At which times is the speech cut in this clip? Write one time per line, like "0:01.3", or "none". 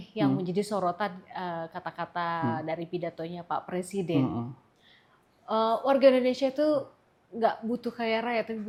none